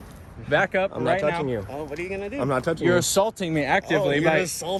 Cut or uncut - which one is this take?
uncut